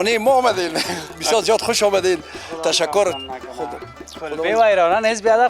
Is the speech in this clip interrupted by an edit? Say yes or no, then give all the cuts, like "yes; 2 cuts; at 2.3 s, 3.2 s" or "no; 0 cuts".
no; 0 cuts